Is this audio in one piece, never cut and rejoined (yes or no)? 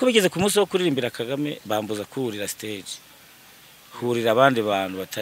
yes